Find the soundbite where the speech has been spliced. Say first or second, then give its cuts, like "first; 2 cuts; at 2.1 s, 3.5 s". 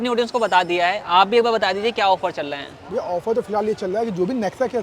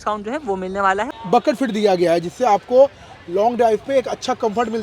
second; 1 cut; at 1.1 s